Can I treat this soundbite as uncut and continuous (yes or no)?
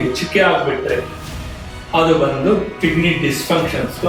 yes